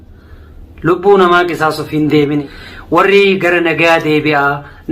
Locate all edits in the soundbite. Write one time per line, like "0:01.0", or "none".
0:02.4